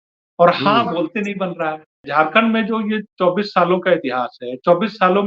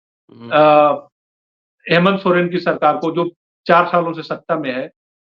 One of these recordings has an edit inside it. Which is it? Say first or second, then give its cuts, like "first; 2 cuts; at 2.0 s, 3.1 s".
first; 1 cut; at 2.0 s